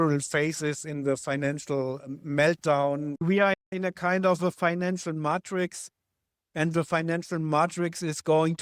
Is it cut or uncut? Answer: cut